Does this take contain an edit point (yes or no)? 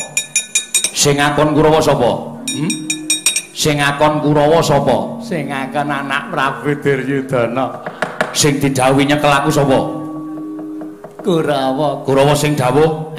no